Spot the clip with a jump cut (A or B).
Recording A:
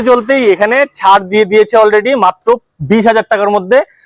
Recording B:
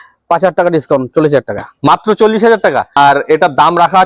B